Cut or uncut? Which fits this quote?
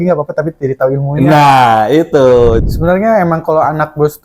cut